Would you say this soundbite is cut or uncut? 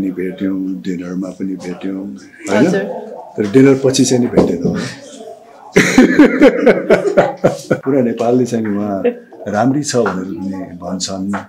cut